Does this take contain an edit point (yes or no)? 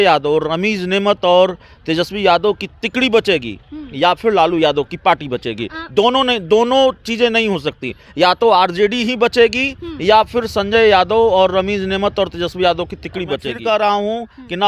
yes